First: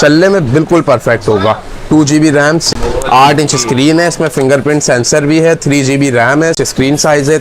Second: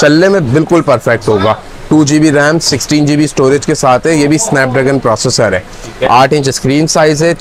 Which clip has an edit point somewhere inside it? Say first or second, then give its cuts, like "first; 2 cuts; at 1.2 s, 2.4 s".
first; 2 cuts; at 2.7 s, 6.6 s